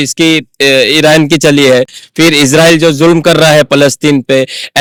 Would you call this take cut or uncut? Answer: uncut